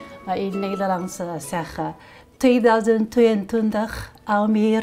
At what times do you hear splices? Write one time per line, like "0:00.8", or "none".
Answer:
none